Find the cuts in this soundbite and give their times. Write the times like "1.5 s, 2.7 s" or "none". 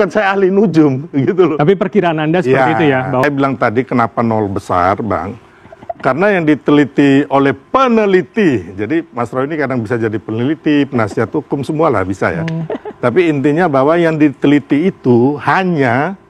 3.2 s